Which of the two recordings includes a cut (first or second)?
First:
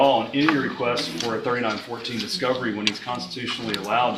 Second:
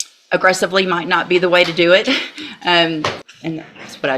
second